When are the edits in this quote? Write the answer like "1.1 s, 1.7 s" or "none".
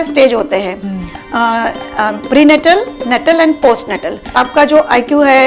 4.3 s